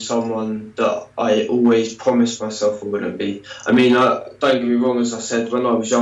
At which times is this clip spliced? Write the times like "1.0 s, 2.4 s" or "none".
none